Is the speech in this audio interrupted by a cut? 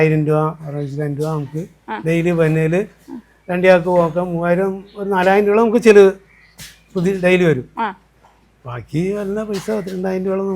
no; 0 cuts

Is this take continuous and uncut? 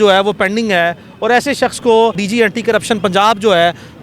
no; 1 cut; at 2.2 s

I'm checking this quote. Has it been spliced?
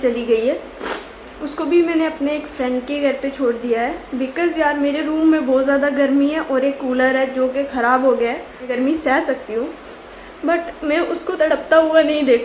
yes; 1 cut; at 8.9 s

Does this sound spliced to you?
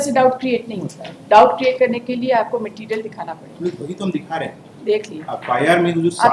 no; 0 cuts

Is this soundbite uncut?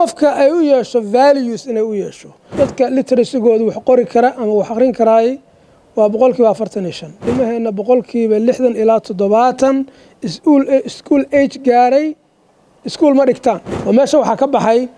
no; 3 cuts; at 2.4 s, 7.2 s, 13.7 s

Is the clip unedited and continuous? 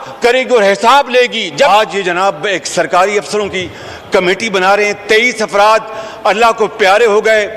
no; 1 cut; at 1.7 s

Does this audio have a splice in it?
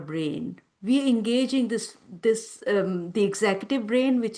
no; 0 cuts

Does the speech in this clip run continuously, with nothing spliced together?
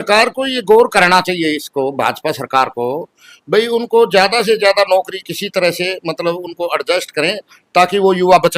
yes; 0 cuts

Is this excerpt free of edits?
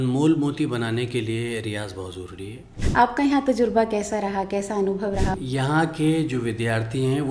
no; 2 cuts; at 2.7 s, 5.3 s

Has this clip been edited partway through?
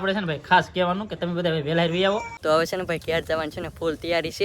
yes; 1 cut; at 2.3 s

